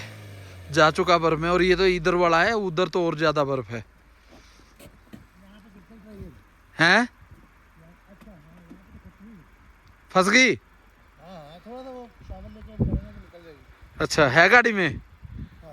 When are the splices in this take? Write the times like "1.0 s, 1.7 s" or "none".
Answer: none